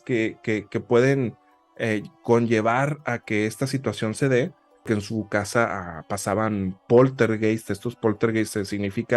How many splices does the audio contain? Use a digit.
1